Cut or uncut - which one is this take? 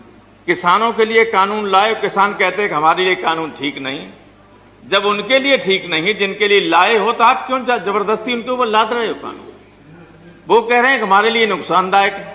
cut